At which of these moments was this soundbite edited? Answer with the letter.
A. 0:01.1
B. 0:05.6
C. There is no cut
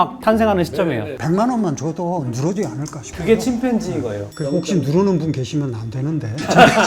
A